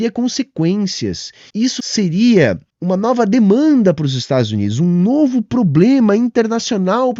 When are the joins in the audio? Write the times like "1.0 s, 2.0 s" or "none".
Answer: 1.8 s, 2.7 s